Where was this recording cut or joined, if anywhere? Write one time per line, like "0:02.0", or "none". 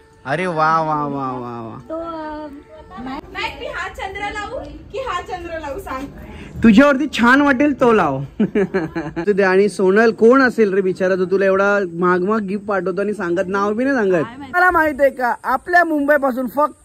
0:03.2
0:09.1
0:14.6